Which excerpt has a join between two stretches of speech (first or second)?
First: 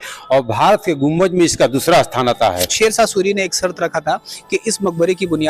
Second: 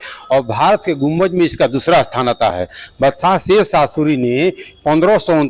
first